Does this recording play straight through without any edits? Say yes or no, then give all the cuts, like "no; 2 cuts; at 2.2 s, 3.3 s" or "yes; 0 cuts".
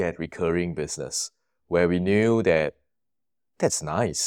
yes; 0 cuts